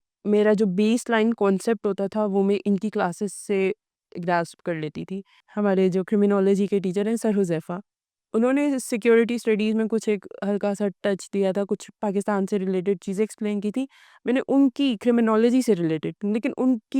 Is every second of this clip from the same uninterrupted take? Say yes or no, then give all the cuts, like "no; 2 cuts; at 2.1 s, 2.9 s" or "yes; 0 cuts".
no; 1 cut; at 5.4 s